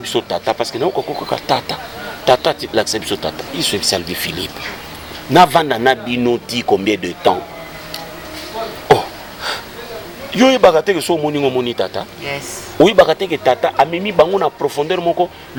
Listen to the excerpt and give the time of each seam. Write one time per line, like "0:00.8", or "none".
none